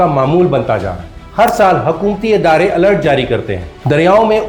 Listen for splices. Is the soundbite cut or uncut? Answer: uncut